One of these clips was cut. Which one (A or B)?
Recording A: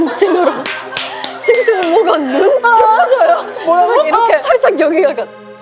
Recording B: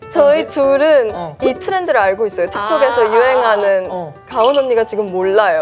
B